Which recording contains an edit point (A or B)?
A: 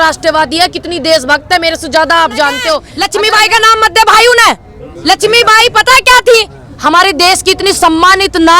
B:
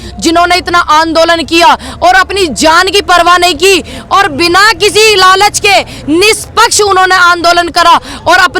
A